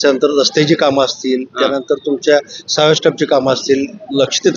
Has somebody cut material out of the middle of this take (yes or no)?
no